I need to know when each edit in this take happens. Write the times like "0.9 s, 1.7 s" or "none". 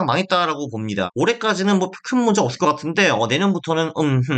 1.1 s